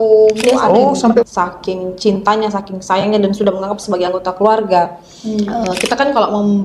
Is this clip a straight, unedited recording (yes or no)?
no